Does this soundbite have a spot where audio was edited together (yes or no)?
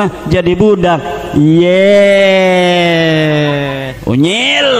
yes